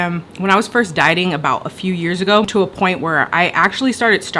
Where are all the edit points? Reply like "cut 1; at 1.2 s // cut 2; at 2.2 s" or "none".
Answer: cut 1; at 2.5 s

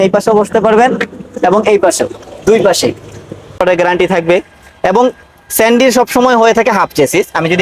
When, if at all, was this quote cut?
cut 1; at 3.6 s

